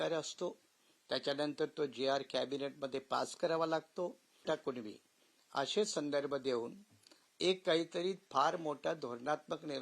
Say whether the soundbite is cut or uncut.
cut